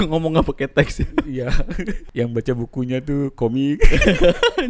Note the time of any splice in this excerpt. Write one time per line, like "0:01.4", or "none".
0:02.0